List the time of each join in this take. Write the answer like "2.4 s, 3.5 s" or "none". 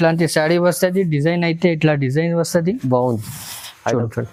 none